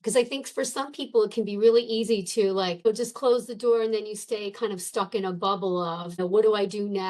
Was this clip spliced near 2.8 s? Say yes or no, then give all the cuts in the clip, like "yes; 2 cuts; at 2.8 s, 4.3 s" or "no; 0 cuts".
yes; 2 cuts; at 2.8 s, 6.2 s